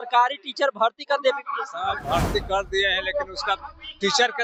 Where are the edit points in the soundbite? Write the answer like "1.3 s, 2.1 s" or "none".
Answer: none